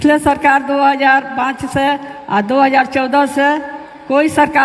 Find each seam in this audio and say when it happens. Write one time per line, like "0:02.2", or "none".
none